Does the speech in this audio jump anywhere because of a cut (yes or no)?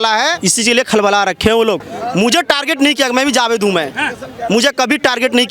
yes